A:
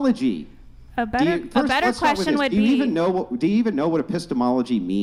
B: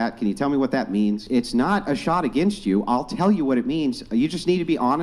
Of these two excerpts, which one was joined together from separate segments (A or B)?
B